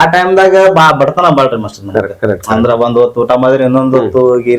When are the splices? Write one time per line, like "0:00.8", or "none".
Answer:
none